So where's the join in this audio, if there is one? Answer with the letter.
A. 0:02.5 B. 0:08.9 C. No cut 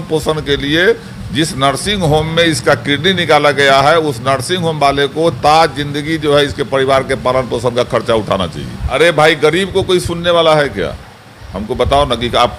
B